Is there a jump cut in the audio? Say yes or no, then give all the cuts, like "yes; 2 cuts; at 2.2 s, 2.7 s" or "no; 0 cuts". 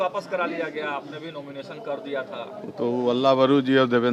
no; 0 cuts